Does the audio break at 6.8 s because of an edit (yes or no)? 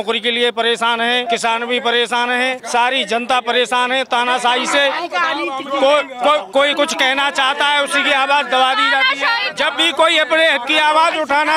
no